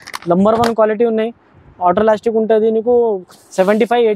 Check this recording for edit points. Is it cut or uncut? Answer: uncut